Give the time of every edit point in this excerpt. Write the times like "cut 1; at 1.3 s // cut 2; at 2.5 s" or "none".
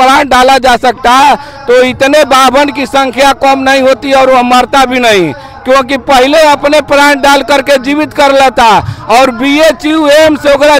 none